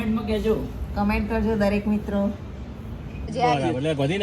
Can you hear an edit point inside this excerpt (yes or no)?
yes